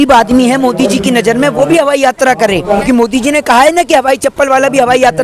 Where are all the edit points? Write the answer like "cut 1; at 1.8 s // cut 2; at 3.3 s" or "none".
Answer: cut 1; at 2.8 s